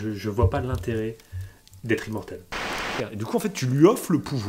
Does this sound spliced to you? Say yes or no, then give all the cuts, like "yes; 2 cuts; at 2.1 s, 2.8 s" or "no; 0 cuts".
yes; 1 cut; at 2.9 s